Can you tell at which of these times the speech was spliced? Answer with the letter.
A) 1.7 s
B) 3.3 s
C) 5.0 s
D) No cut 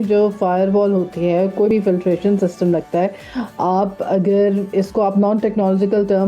A